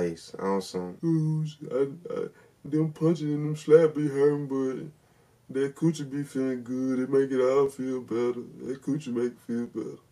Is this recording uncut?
yes; 0 cuts

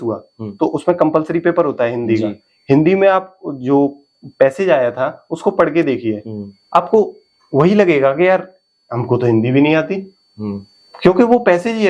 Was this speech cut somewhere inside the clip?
no; 0 cuts

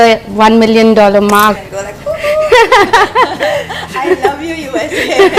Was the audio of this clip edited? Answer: yes; 1 cut; at 1.6 s

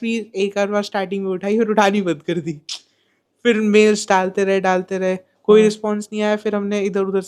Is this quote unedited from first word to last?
yes; 0 cuts

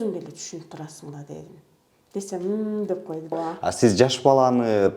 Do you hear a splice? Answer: yes; 1 cut; at 3.3 s

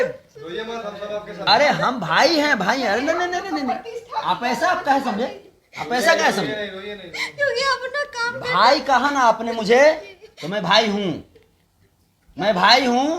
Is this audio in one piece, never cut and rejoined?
no; 1 cut; at 1.3 s

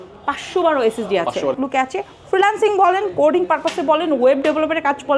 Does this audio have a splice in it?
yes; 1 cut; at 1.6 s

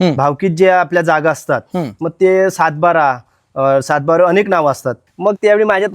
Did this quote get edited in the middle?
yes; 1 cut; at 4.9 s

